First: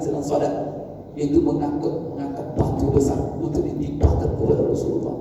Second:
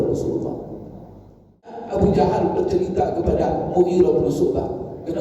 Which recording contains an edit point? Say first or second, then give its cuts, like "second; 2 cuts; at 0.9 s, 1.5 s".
second; 1 cut; at 1.8 s